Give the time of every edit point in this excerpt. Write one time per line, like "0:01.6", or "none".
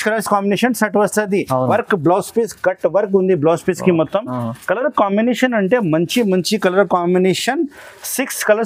0:01.7